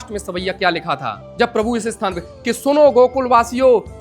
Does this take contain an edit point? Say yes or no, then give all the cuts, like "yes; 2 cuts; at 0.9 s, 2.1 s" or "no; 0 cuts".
yes; 1 cut; at 1.2 s